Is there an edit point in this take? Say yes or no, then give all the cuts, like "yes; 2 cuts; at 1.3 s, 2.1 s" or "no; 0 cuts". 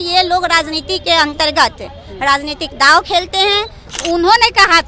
yes; 1 cut; at 3.8 s